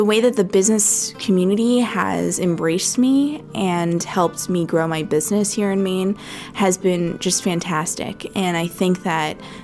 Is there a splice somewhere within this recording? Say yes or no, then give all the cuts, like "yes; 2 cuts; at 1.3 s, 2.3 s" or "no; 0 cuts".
yes; 1 cut; at 1.1 s